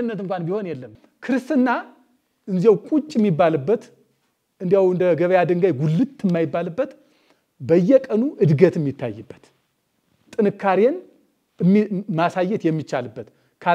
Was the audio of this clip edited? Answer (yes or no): yes